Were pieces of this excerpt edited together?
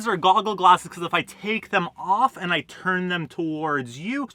no; 0 cuts

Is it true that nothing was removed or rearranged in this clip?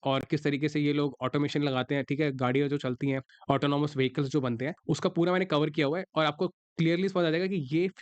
no; 2 cuts; at 3.3 s, 4.7 s

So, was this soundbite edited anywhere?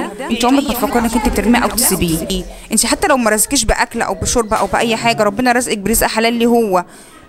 yes; 1 cut; at 2.4 s

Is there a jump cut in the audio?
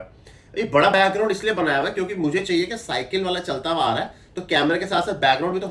no; 0 cuts

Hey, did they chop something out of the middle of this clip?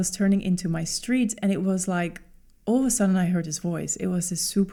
no; 0 cuts

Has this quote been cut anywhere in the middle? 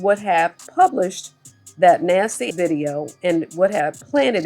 yes; 1 cut; at 2.5 s

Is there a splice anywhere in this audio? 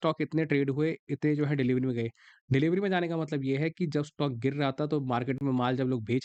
no; 0 cuts

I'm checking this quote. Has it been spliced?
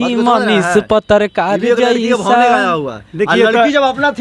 no; 0 cuts

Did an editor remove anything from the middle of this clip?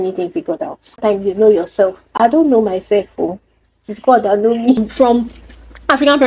yes; 2 cuts; at 1.0 s, 4.9 s

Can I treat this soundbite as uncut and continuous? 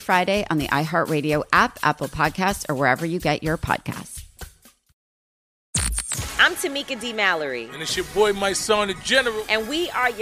no; 1 cut; at 5.5 s

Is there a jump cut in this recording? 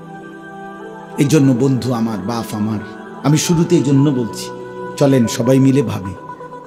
no; 0 cuts

